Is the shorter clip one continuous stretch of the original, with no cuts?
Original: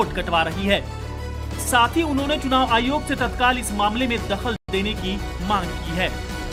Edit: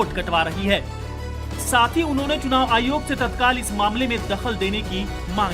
no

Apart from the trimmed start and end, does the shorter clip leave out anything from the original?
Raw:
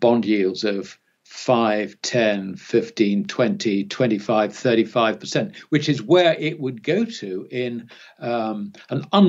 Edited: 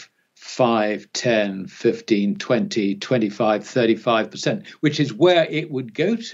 no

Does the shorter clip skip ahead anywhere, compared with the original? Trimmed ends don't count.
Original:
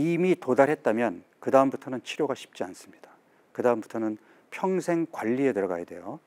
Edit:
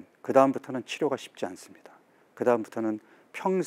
no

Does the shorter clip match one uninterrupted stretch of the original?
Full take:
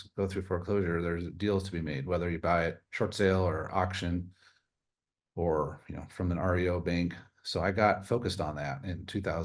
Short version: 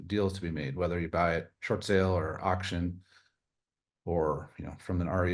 yes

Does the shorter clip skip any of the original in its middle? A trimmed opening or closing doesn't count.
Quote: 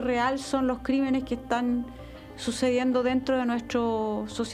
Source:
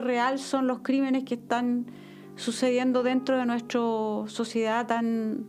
no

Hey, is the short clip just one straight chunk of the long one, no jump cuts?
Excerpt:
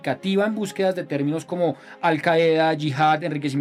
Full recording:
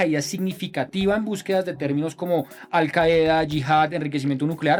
yes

